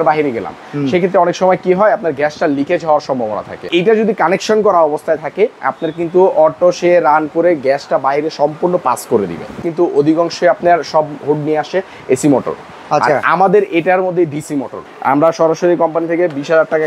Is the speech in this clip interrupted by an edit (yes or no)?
yes